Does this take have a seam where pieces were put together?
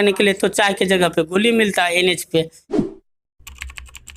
no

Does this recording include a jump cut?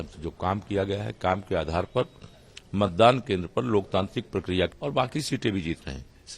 yes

